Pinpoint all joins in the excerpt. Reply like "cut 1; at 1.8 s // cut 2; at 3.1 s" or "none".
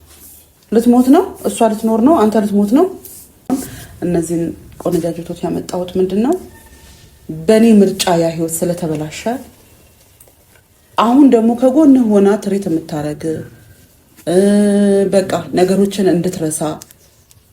cut 1; at 3.5 s